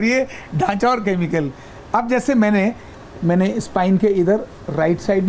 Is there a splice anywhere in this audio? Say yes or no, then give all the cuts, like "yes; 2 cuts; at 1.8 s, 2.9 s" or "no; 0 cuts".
yes; 1 cut; at 2.9 s